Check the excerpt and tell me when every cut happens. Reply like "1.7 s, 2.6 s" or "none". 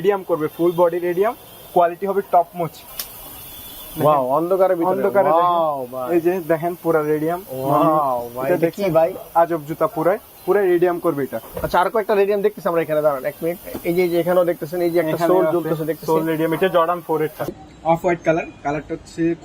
2.9 s, 17.5 s